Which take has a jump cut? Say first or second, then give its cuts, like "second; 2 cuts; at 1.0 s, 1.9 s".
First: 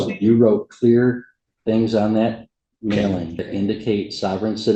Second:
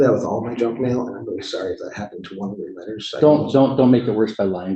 first; 1 cut; at 3.5 s